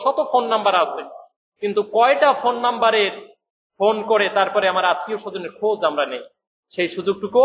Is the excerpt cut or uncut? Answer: uncut